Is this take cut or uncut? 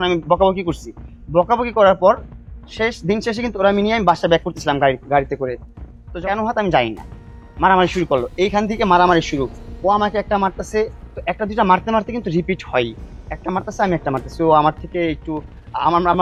uncut